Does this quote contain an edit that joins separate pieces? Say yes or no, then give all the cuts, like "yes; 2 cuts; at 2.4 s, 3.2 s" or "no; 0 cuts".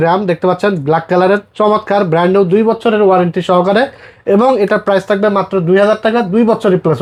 no; 0 cuts